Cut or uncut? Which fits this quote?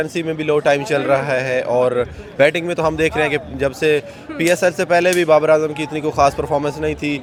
uncut